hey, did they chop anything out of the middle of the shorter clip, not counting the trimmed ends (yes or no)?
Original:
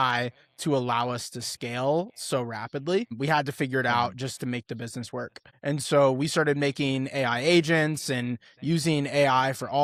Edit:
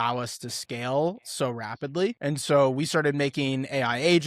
yes